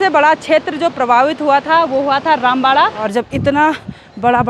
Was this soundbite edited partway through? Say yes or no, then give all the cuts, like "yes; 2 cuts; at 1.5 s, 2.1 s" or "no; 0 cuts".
yes; 1 cut; at 3.0 s